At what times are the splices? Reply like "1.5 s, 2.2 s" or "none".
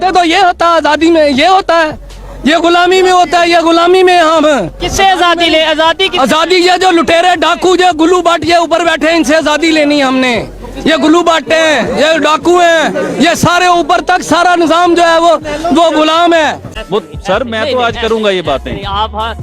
none